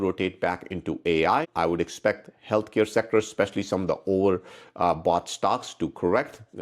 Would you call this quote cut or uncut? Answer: cut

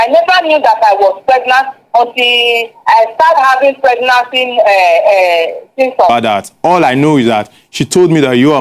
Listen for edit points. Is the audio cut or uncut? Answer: cut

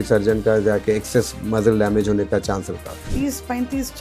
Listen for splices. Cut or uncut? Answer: cut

